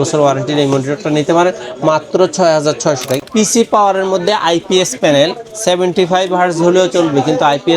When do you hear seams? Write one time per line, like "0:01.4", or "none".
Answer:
0:03.2